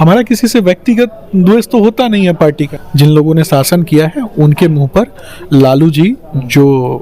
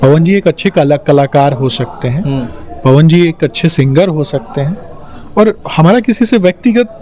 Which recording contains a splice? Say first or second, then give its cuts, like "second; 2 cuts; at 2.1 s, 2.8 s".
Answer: first; 1 cut; at 2.8 s